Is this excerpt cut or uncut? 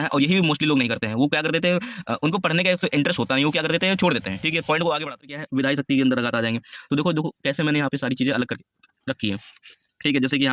cut